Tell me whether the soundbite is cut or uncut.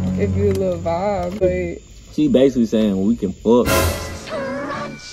cut